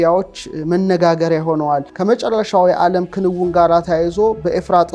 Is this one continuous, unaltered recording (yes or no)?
no